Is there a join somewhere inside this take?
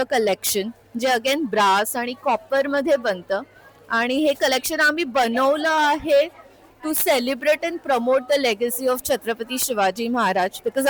no; 0 cuts

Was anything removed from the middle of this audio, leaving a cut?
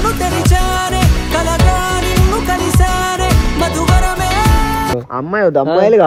no; 0 cuts

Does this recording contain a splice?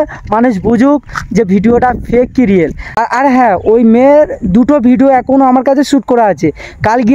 yes; 1 cut; at 3.0 s

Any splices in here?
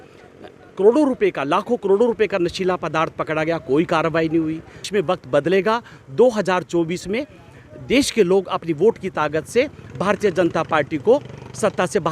yes; 1 cut; at 4.9 s

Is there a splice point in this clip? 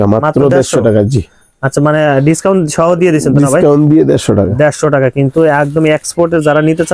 no; 0 cuts

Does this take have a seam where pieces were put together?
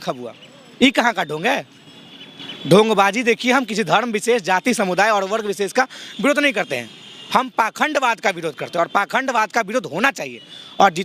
no; 0 cuts

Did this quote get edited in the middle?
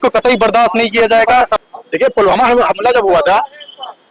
yes; 1 cut; at 1.6 s

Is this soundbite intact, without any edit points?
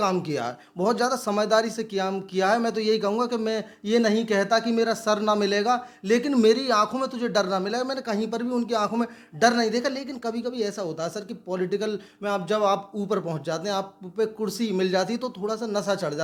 yes; 0 cuts

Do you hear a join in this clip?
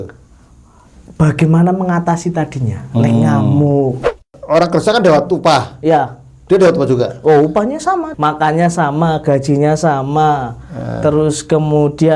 yes; 2 cuts; at 4.2 s, 8.1 s

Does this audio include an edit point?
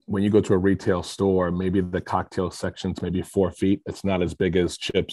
no; 0 cuts

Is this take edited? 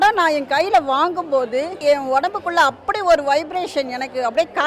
yes; 1 cut; at 1.7 s

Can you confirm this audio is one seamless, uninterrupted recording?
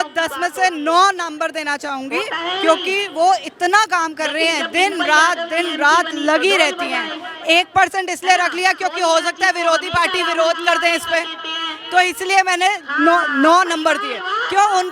yes; 0 cuts

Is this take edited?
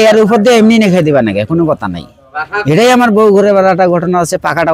no; 0 cuts

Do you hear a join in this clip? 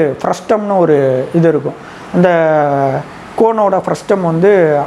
no; 0 cuts

